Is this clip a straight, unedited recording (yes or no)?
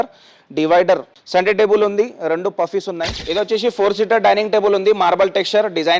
no